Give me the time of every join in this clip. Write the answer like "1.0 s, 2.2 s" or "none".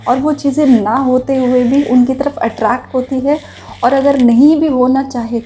none